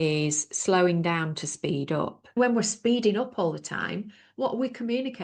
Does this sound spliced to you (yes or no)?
yes